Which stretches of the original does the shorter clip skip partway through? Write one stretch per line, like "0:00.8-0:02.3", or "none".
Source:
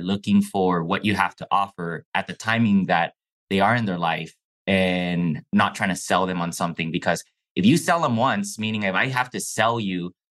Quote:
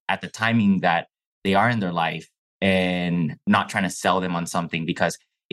none

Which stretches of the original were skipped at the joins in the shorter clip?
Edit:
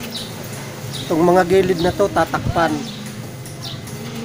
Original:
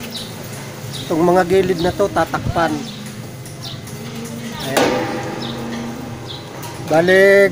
none

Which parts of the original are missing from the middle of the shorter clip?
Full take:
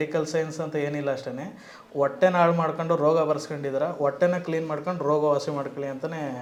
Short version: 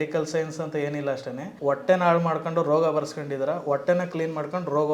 0:01.4-0:01.8

